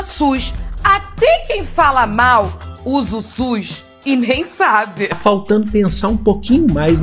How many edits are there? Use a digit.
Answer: 1